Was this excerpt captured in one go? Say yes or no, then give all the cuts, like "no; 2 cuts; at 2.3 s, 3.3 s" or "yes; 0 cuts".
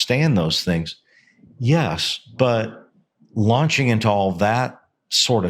yes; 0 cuts